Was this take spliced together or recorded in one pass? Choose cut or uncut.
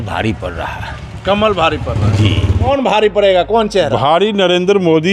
cut